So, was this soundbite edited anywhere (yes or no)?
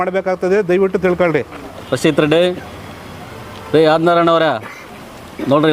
yes